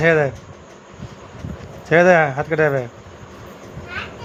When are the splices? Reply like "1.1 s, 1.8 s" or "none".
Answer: none

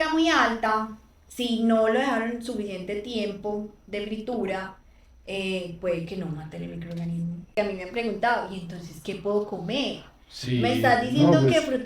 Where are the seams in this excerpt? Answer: 7.5 s

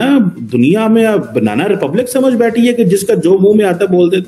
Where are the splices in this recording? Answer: none

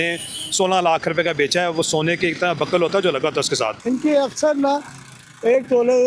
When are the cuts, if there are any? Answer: 3.8 s

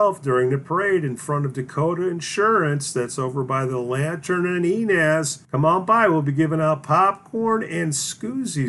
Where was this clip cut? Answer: 5.4 s

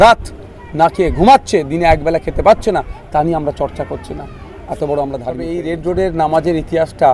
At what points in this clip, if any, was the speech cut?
5.4 s

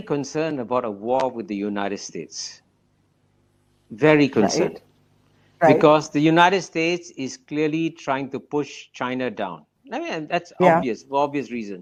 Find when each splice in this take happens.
none

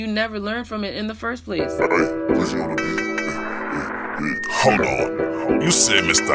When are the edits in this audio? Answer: 1.5 s

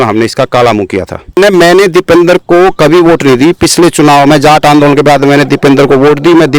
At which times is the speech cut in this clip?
1.4 s

